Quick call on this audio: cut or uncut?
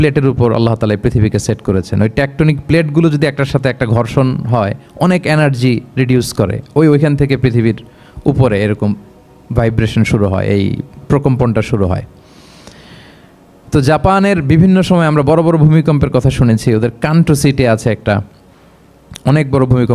uncut